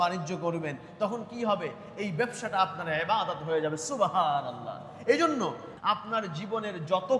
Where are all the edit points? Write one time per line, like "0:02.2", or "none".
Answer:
0:05.6